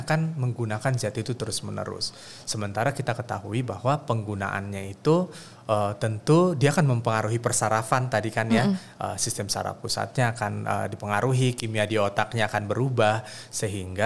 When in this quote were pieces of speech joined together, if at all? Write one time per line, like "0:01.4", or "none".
none